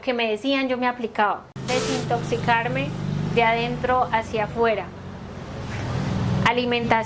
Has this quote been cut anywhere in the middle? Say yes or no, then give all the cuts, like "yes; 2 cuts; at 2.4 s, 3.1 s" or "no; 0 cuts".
yes; 1 cut; at 1.5 s